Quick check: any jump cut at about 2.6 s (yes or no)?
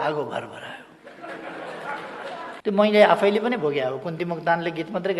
yes